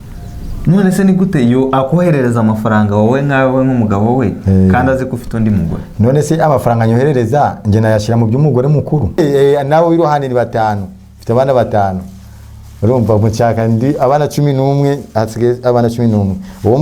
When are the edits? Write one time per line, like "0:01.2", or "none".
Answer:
0:09.2